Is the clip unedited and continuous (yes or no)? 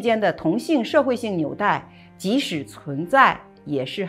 yes